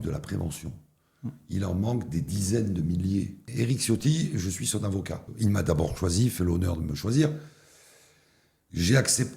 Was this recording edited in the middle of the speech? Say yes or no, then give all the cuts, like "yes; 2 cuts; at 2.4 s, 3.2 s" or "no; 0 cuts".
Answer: yes; 2 cuts; at 3.5 s, 5.3 s